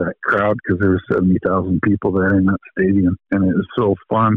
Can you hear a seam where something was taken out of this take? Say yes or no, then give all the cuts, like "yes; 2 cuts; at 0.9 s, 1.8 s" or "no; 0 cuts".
yes; 1 cut; at 3.2 s